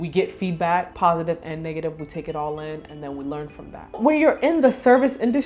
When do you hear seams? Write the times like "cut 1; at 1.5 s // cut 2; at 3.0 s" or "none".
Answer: cut 1; at 0.9 s // cut 2; at 4.0 s